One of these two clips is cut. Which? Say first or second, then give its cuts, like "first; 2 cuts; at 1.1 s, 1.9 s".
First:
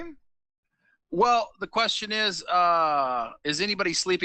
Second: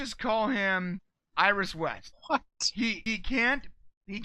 second; 3 cuts; at 1.2 s, 2.1 s, 3.1 s